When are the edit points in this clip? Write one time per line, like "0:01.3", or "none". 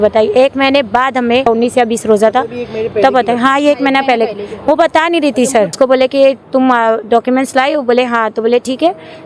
0:01.4
0:05.7